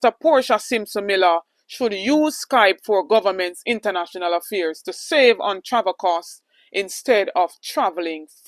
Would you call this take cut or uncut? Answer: uncut